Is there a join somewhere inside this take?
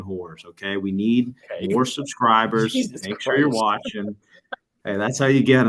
no; 0 cuts

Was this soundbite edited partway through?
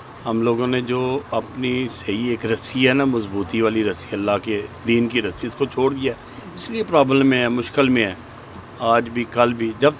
no; 0 cuts

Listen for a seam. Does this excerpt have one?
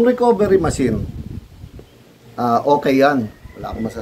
no; 0 cuts

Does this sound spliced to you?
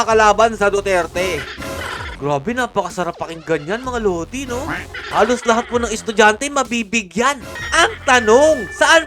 yes; 3 cuts; at 2.0 s, 4.9 s, 7.5 s

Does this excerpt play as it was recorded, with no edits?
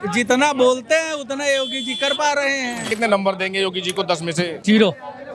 no; 2 cuts; at 2.9 s, 4.6 s

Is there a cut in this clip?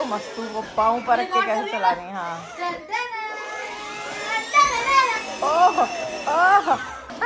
no; 0 cuts

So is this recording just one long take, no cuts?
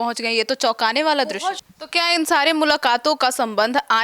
no; 1 cut; at 1.6 s

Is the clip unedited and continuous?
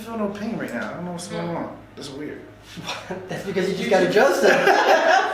yes; 0 cuts

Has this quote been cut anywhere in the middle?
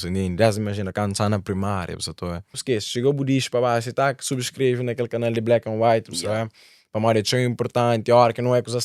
yes; 1 cut; at 2.6 s

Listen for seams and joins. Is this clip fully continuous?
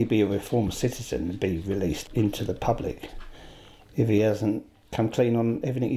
no; 2 cuts; at 2.0 s, 4.8 s

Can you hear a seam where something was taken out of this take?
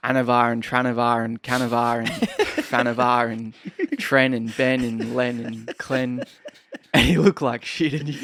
no; 0 cuts

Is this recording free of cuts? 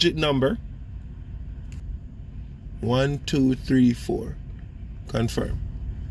no; 1 cut; at 1.8 s

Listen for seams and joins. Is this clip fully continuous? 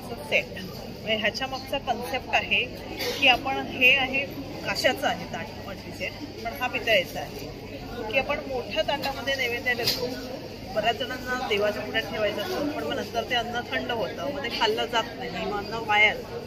yes; 0 cuts

